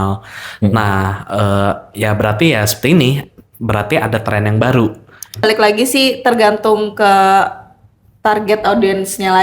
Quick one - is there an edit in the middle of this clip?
yes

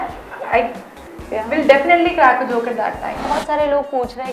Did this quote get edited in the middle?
yes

